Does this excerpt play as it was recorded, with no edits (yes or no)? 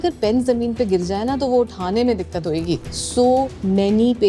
no